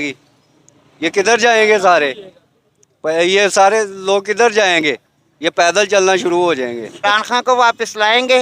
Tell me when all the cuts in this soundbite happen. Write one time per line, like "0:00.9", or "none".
0:07.0